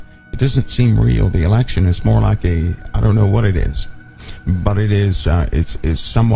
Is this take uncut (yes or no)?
no